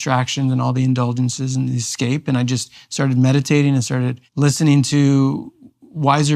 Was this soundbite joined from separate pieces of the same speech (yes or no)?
yes